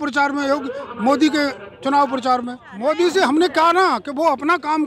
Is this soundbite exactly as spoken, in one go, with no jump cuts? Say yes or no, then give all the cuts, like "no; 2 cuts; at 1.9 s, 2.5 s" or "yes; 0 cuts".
no; 1 cut; at 2.6 s